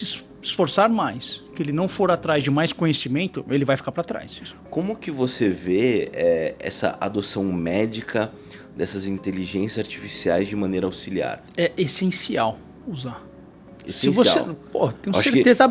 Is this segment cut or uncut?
cut